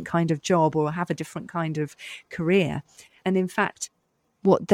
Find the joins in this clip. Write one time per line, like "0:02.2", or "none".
0:03.2